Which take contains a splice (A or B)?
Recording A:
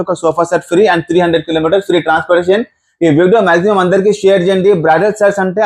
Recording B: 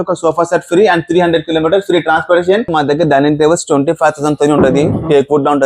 B